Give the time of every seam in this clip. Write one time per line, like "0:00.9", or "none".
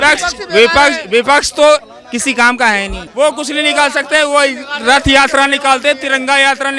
0:03.0